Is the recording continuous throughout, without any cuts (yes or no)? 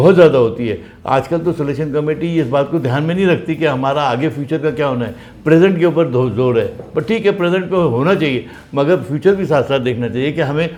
yes